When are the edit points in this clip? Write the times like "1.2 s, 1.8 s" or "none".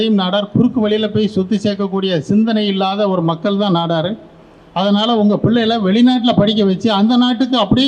none